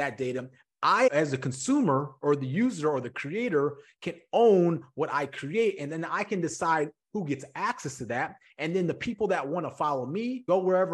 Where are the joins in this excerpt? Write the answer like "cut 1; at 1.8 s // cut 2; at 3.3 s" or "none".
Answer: none

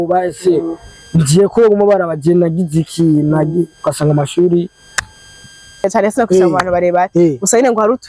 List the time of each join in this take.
cut 1; at 5.8 s

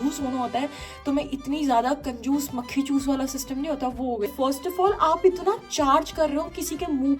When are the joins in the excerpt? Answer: cut 1; at 4.3 s

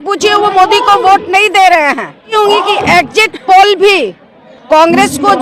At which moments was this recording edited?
cut 1; at 2.4 s

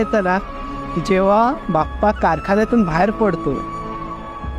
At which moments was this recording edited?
none

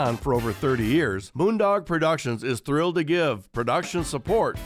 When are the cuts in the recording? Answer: cut 1; at 1.2 s

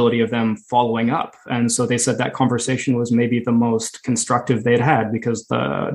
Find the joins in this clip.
none

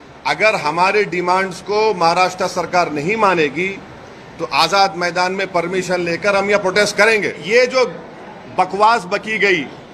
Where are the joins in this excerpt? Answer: cut 1; at 7.4 s

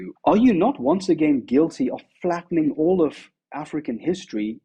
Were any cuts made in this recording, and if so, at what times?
none

